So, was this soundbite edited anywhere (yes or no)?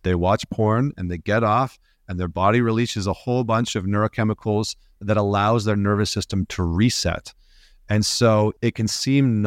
yes